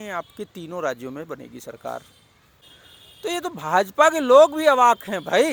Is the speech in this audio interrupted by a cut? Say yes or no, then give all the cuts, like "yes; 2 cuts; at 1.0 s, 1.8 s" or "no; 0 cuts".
no; 0 cuts